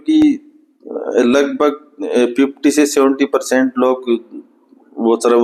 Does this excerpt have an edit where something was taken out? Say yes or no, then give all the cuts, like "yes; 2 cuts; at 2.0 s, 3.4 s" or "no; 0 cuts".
no; 0 cuts